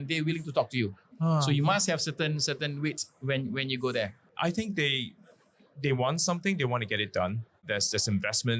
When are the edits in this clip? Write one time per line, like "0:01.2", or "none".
0:04.3
0:07.6